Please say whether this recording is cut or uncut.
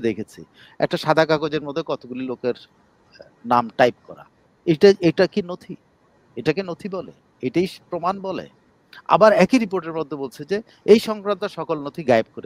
uncut